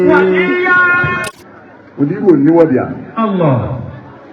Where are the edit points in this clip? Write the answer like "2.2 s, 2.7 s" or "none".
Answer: 1.2 s